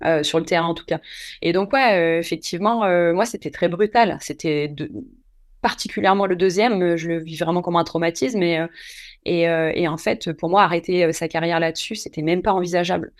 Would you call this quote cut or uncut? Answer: uncut